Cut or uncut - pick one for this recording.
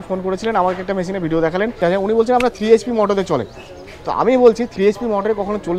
cut